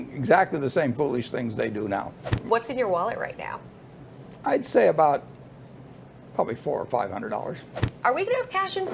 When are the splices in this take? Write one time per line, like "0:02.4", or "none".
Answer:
0:02.3
0:07.8